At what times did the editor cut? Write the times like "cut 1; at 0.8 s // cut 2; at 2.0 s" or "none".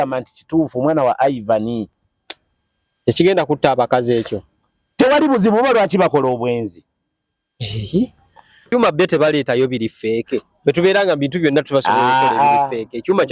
cut 1; at 8.7 s